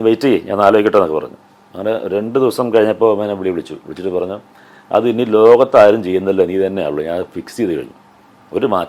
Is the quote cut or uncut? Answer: uncut